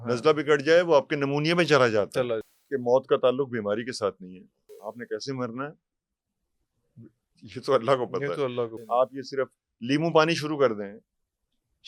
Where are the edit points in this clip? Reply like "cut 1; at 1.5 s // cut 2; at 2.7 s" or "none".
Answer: cut 1; at 2.4 s // cut 2; at 4.8 s // cut 3; at 8.8 s